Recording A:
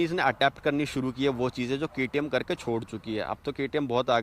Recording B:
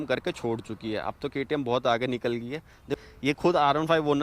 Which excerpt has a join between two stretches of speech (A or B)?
B